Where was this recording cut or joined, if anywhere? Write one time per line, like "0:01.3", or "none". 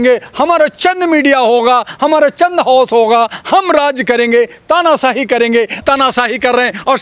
0:05.8